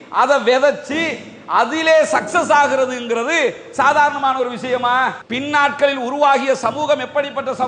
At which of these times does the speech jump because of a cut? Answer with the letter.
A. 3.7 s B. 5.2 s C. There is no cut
B